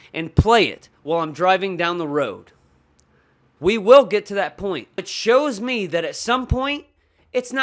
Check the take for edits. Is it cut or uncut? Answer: cut